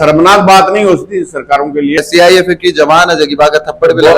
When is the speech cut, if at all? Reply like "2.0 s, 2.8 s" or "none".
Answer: 2.0 s